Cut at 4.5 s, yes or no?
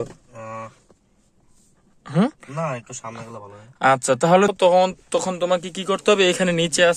yes